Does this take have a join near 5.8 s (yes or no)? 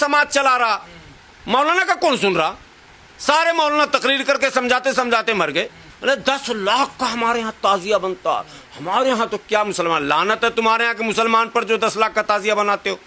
yes